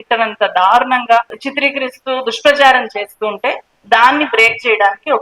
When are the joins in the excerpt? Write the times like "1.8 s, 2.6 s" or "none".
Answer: none